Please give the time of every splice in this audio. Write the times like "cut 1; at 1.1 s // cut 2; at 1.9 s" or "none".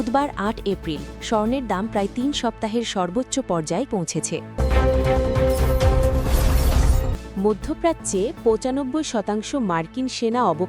cut 1; at 4.5 s